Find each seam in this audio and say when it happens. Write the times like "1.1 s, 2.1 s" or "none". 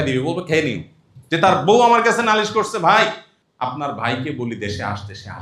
1.4 s

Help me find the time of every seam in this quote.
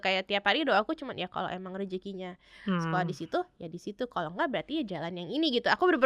none

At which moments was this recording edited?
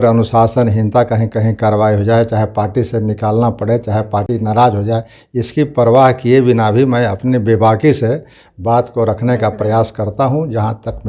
none

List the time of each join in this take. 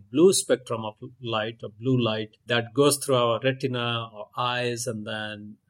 2.4 s

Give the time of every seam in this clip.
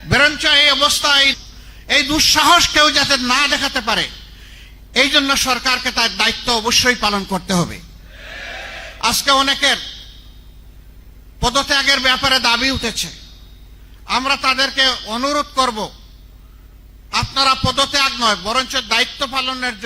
1.3 s

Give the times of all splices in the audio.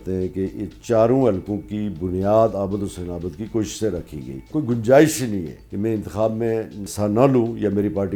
4.5 s, 5.6 s, 6.8 s

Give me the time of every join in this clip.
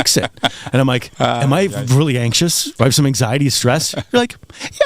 1.1 s, 2.7 s

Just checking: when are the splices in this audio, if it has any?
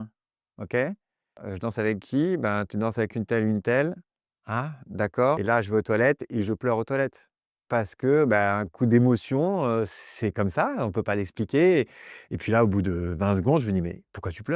1.4 s, 5.4 s

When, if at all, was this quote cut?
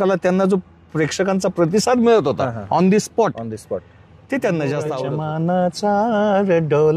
5.1 s

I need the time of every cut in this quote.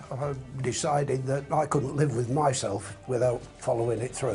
none

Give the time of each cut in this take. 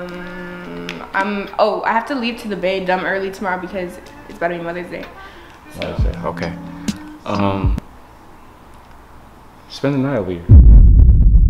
10.4 s

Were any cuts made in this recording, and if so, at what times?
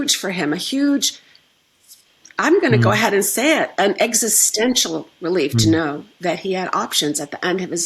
none

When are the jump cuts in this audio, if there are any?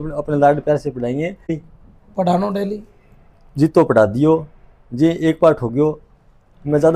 1.6 s

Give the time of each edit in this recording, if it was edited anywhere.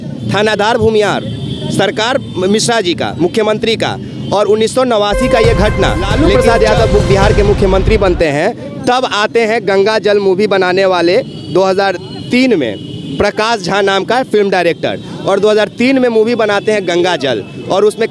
6.2 s

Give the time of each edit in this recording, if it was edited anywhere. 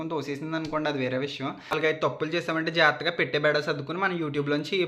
1.8 s

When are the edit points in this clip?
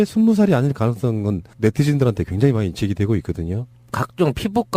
3.3 s

